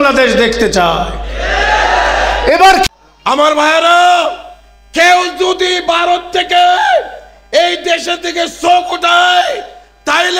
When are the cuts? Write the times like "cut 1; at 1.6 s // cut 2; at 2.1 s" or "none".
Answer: cut 1; at 2.9 s